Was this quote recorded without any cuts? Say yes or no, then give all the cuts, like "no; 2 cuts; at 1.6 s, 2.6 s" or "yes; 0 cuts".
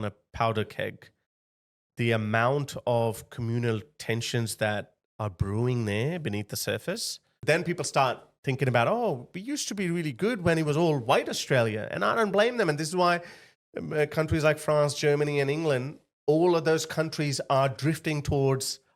no; 1 cut; at 7.3 s